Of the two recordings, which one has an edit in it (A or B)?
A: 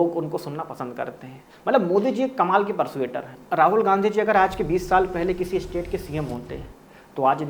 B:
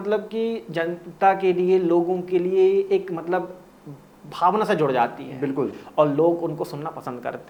A